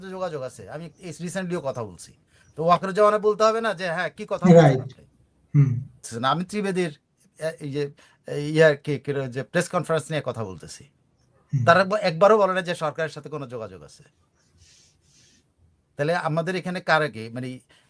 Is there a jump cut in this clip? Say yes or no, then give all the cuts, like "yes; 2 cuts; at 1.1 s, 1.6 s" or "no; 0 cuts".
yes; 1 cut; at 6.1 s